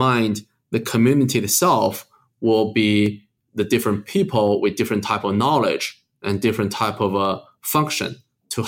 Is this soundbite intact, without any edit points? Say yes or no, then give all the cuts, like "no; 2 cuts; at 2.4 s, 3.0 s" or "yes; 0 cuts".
yes; 0 cuts